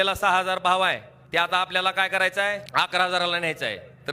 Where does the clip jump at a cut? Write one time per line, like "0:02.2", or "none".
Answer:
0:01.1
0:02.6